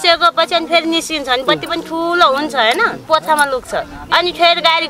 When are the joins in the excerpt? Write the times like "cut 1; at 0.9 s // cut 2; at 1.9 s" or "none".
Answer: cut 1; at 3.1 s